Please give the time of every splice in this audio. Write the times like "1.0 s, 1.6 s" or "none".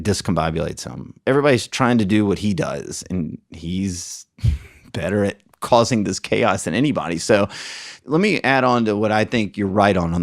1.2 s, 7.9 s